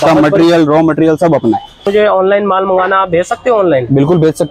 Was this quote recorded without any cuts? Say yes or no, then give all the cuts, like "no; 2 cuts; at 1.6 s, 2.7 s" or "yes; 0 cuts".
no; 1 cut; at 1.8 s